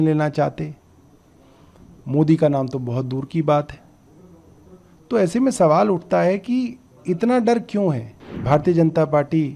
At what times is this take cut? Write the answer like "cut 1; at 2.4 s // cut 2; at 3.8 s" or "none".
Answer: cut 1; at 8.3 s